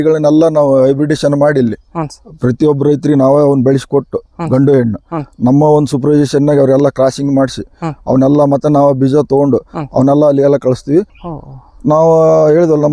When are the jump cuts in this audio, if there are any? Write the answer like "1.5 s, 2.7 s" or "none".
11.2 s